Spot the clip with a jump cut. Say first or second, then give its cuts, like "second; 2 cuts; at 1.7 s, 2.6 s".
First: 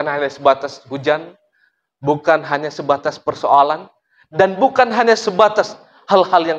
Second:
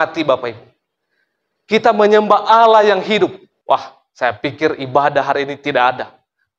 second; 1 cut; at 3.5 s